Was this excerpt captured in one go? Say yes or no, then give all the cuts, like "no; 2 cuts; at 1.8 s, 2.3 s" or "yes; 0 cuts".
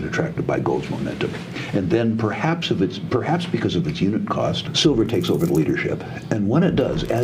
no; 1 cut; at 4.7 s